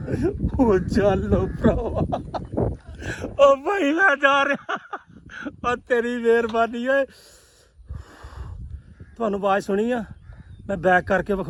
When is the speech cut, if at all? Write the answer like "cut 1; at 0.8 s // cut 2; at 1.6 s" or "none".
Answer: none